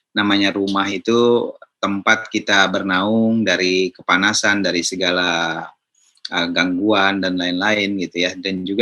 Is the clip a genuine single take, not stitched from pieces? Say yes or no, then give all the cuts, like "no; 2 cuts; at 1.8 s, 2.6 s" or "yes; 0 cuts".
yes; 0 cuts